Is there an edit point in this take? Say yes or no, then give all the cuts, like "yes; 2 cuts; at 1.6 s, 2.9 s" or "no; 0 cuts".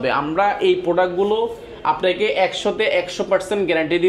no; 0 cuts